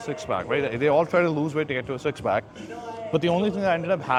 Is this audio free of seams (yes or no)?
yes